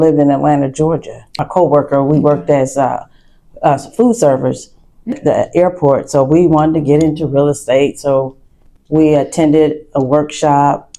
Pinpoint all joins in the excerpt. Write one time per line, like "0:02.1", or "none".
0:01.4
0:05.2